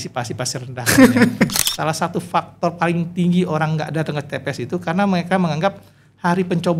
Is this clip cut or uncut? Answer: cut